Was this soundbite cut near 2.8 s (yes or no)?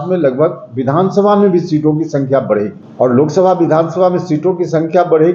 yes